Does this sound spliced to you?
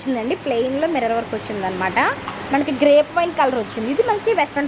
no; 0 cuts

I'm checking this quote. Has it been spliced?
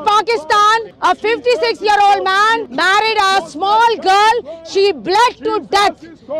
yes; 2 cuts; at 0.9 s, 2.7 s

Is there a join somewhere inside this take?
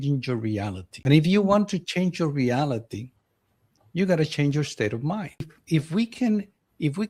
yes; 2 cuts; at 1.1 s, 5.6 s

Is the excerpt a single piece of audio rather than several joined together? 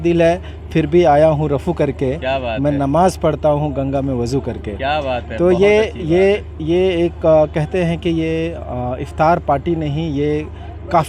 yes; 0 cuts

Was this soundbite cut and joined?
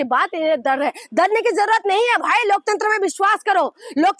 no; 0 cuts

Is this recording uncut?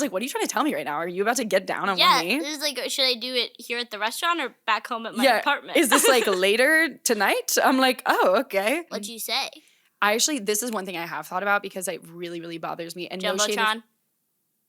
no; 1 cut; at 9.0 s

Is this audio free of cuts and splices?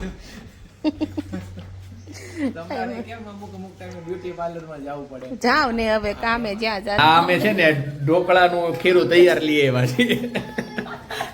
no; 1 cut; at 7.0 s

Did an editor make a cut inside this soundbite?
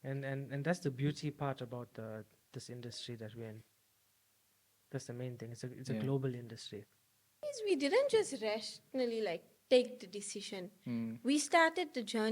yes; 1 cut; at 7.5 s

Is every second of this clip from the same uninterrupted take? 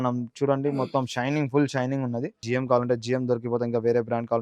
no; 1 cut; at 2.4 s

